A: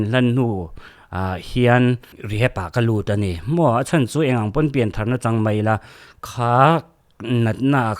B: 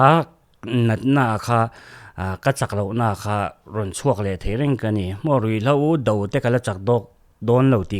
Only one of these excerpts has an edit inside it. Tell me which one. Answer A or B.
A